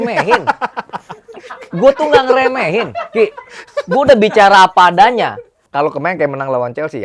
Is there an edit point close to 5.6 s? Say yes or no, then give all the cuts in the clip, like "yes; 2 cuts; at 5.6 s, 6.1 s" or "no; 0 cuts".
yes; 1 cut; at 5.6 s